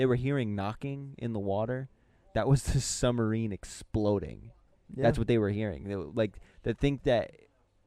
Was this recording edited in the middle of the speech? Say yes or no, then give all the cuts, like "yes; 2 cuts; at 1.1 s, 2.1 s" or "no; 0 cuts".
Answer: no; 0 cuts